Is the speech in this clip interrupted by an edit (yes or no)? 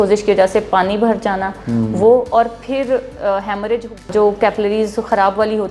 yes